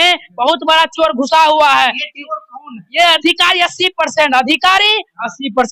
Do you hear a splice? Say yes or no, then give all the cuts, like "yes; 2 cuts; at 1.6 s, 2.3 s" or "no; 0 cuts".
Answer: no; 0 cuts